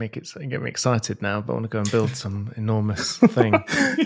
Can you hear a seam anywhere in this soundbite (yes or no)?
no